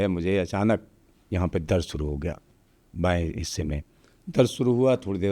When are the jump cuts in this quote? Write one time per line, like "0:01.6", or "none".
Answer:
none